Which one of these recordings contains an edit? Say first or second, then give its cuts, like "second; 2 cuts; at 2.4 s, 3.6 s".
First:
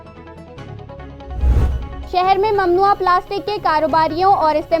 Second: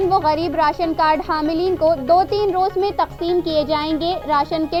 first; 1 cut; at 1.6 s